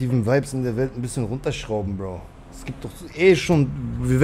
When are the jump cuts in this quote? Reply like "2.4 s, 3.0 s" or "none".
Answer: none